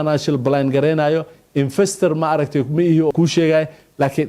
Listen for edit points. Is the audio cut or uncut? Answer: cut